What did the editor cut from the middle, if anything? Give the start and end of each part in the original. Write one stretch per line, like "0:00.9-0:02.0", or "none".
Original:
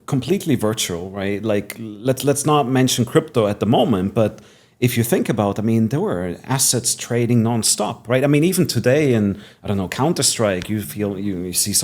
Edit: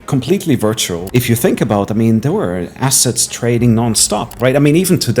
0:00.9-0:04.6